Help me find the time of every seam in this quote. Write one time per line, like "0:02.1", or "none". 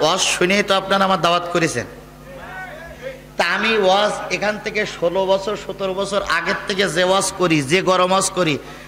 none